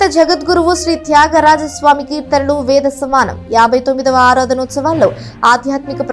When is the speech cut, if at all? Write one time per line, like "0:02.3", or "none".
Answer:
none